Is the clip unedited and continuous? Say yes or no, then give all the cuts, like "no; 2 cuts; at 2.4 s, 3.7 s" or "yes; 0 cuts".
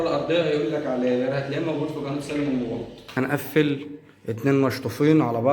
no; 1 cut; at 3.2 s